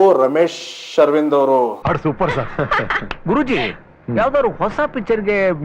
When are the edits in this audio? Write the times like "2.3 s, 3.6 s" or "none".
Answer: 1.8 s